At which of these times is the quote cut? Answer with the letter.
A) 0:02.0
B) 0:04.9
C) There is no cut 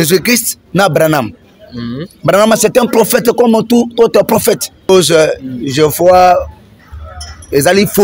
B